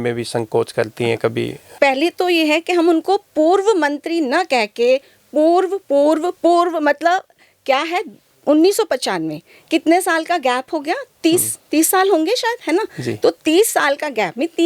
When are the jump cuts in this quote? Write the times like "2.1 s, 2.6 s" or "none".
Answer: 1.7 s